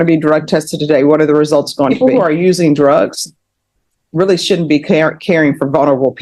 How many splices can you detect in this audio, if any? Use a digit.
1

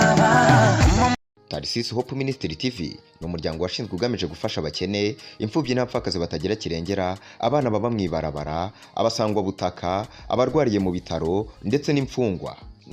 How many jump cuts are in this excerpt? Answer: 1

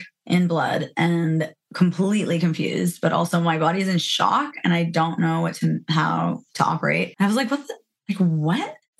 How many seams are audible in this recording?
1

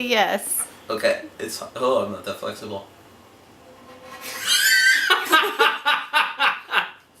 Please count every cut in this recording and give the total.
1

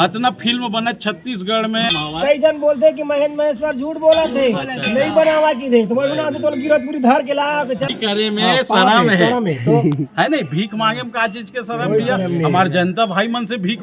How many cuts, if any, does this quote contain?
2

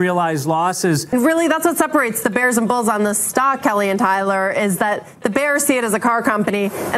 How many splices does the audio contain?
1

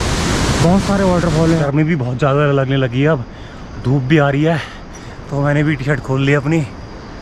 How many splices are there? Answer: 1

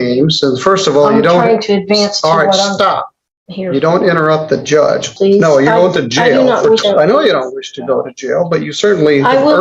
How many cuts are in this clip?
2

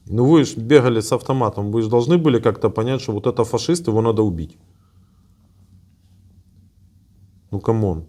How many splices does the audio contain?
0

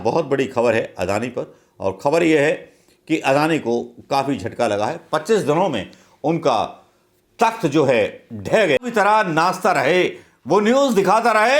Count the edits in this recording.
1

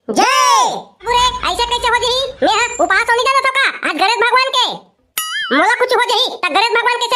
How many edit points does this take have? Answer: 1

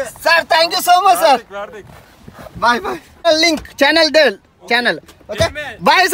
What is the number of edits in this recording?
1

